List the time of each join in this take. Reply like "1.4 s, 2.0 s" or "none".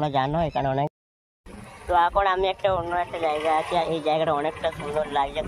0.9 s